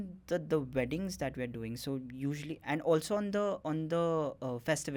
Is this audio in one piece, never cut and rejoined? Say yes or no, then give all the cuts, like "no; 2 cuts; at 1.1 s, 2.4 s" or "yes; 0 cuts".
yes; 0 cuts